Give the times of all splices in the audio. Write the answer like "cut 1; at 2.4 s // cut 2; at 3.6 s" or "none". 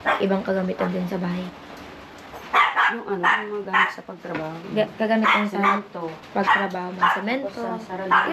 none